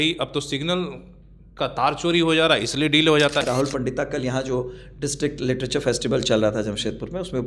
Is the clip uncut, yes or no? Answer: no